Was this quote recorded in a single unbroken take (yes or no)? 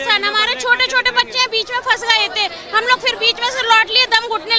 yes